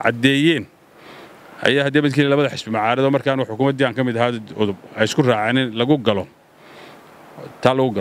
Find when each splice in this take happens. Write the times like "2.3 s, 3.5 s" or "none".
none